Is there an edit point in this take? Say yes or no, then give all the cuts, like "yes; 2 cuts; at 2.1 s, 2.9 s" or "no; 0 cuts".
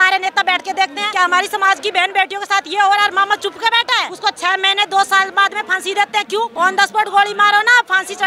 yes; 3 cuts; at 1.0 s, 4.1 s, 6.5 s